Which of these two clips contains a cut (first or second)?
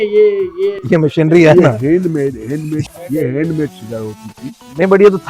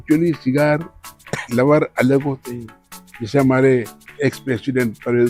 first